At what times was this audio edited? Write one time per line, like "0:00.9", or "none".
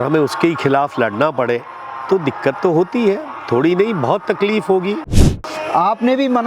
0:05.2